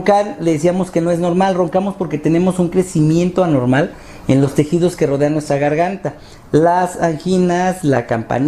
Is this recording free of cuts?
no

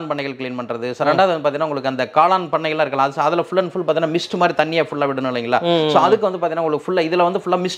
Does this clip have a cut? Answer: no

